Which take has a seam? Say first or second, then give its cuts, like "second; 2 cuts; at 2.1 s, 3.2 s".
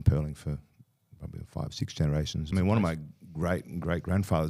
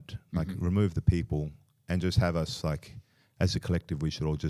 first; 1 cut; at 2.5 s